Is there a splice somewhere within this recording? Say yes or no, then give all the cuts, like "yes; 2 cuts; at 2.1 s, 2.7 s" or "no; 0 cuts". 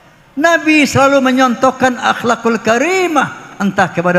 no; 0 cuts